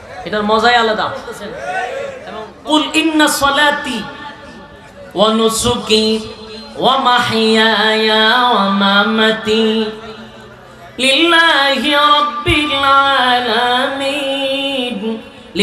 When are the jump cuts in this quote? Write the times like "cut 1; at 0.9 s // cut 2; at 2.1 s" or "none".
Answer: cut 1; at 2.5 s